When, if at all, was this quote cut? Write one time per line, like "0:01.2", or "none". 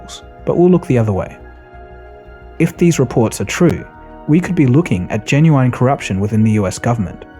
none